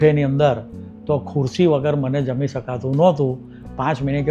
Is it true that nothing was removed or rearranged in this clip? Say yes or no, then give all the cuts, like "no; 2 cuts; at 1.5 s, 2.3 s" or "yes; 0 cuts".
yes; 0 cuts